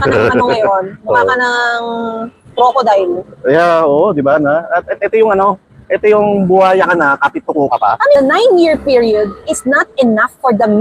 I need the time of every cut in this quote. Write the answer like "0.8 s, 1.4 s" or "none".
8.2 s